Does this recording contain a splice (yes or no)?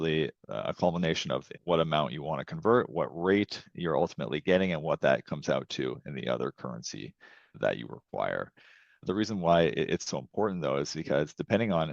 yes